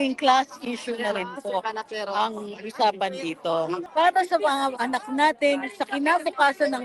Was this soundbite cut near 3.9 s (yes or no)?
yes